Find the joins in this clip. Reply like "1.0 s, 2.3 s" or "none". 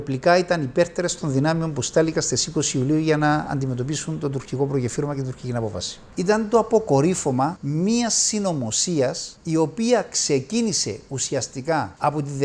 6.0 s